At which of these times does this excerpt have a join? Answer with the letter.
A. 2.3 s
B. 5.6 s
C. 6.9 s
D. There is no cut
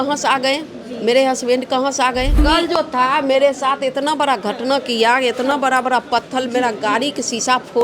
A